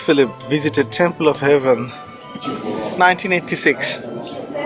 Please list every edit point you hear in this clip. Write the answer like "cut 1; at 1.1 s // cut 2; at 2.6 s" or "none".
cut 1; at 2.5 s